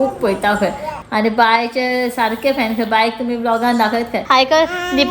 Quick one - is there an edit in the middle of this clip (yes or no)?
yes